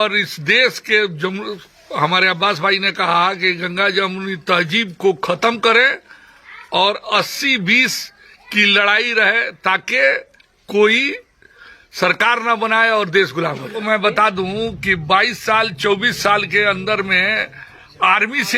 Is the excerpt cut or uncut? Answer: cut